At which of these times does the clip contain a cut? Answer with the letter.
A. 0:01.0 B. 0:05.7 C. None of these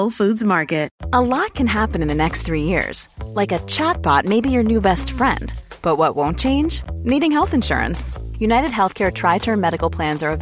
A